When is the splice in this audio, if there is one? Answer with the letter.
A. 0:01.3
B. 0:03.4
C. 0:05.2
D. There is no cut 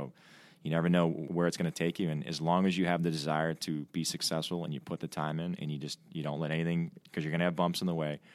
A